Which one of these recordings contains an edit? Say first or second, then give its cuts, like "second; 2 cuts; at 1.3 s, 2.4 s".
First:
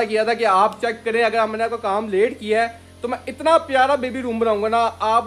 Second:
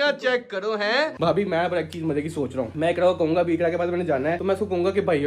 second; 3 cuts; at 1.1 s, 2.7 s, 4.4 s